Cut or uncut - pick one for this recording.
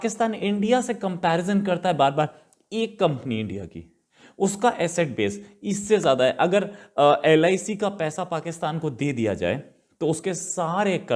uncut